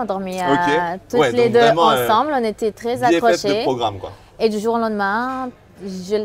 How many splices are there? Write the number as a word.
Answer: zero